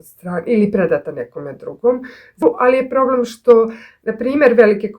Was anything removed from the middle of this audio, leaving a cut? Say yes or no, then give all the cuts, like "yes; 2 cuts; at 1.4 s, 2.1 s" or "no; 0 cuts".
yes; 1 cut; at 2.4 s